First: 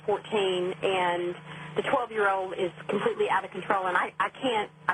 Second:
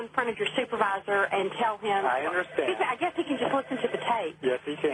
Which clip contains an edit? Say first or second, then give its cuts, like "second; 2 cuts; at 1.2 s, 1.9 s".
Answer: first; 1 cut; at 1.1 s